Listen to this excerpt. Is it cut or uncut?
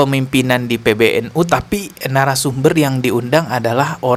uncut